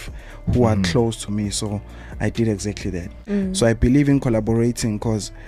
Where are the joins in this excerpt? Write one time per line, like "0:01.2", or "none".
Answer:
0:03.1